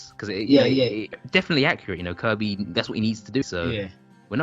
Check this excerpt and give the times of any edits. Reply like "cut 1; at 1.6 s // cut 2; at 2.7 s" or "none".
cut 1; at 1.1 s // cut 2; at 3.4 s